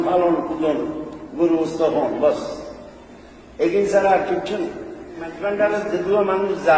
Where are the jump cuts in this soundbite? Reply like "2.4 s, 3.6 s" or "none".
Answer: 5.4 s